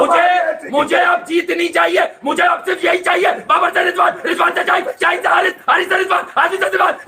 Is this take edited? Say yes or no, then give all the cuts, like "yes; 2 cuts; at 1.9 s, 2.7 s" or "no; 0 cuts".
no; 0 cuts